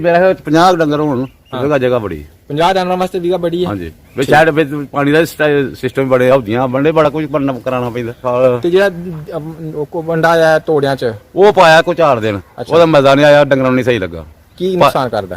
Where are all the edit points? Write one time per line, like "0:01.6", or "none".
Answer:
0:08.2